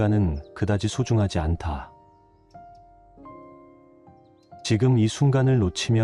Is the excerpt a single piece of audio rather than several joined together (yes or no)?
yes